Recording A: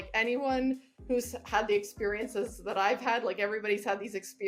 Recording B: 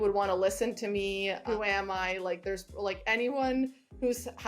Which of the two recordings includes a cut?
B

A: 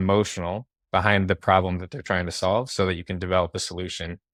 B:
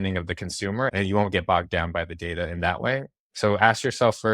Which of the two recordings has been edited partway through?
B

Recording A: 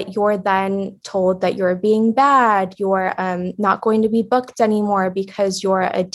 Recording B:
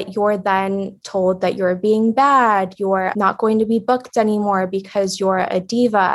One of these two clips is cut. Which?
B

